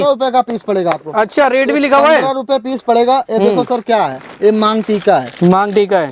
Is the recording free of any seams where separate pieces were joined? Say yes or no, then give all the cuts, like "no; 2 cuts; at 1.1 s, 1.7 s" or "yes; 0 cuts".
yes; 0 cuts